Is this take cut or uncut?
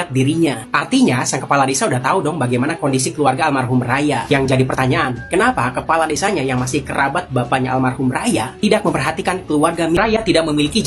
cut